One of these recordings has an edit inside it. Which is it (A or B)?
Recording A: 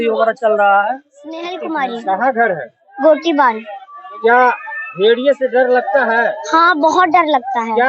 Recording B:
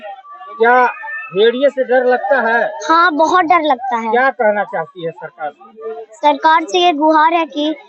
A